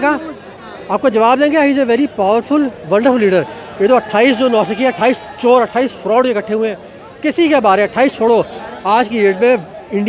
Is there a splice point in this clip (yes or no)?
no